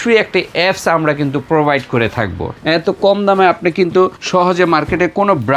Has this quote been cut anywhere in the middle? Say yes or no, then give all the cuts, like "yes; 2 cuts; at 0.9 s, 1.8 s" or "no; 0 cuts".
yes; 2 cuts; at 2.4 s, 4.2 s